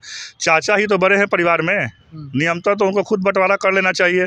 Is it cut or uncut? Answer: uncut